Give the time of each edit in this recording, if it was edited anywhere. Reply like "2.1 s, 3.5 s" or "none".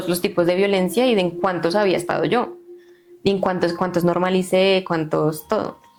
none